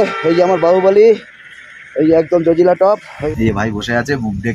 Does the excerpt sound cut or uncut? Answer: cut